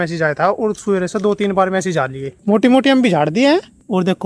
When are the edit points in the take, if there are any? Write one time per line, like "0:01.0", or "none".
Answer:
0:02.3

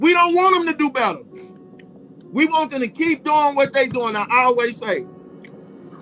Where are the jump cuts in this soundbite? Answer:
0:05.0

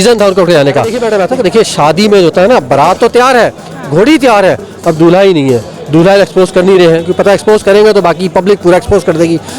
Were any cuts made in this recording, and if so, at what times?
0:01.0

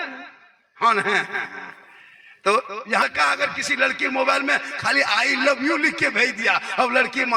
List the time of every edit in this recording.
0:03.0

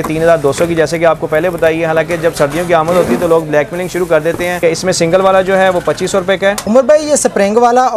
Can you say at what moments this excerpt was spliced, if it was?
0:04.6
0:06.6

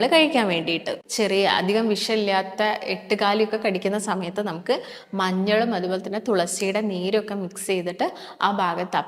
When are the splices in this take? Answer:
0:01.0

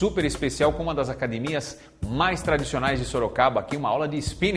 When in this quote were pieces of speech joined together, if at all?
0:03.3

